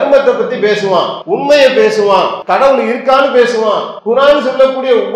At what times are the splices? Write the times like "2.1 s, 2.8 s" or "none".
1.2 s, 2.4 s, 3.9 s